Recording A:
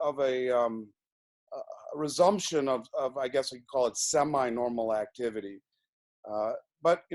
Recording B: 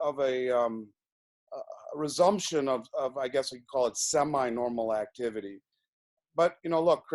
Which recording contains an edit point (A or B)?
B